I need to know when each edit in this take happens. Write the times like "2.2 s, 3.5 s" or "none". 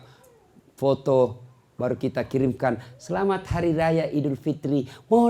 none